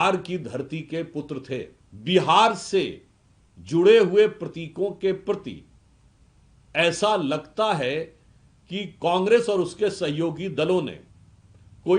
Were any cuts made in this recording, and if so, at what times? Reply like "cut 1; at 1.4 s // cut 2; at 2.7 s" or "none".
cut 1; at 1.8 s